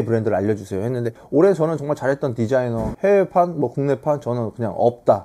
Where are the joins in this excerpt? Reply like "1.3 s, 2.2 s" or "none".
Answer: 1.1 s